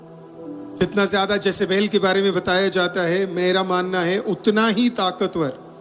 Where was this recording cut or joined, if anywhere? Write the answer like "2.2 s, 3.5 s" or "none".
none